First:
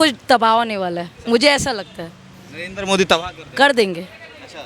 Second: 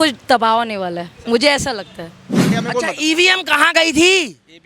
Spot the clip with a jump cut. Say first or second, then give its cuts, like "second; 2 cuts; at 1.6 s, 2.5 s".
second; 1 cut; at 2.5 s